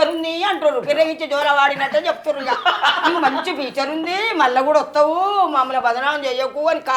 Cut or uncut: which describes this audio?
uncut